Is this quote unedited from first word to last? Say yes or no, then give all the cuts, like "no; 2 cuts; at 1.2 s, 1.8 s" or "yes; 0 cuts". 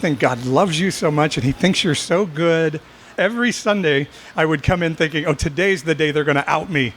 no; 1 cut; at 3.1 s